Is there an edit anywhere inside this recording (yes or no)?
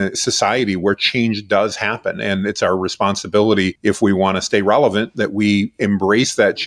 yes